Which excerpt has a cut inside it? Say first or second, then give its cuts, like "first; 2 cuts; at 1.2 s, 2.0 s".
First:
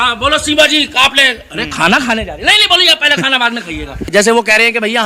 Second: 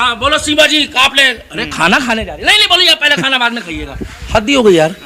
first; 1 cut; at 4.1 s